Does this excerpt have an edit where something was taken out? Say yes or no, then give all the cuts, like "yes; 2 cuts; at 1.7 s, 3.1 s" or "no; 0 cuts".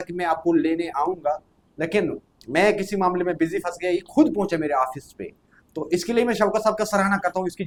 no; 0 cuts